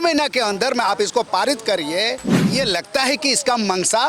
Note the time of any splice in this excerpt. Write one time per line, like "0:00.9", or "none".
0:02.4